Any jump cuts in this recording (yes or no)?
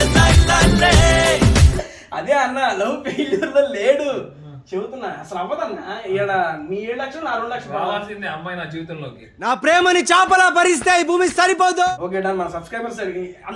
no